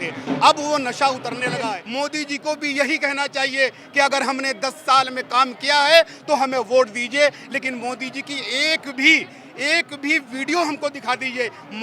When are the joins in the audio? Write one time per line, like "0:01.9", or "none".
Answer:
0:01.8